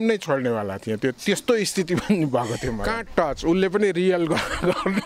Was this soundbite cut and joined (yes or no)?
yes